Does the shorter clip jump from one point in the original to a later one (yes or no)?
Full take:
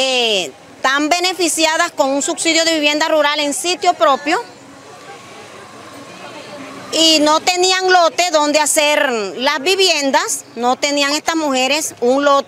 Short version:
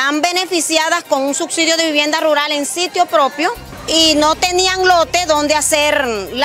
yes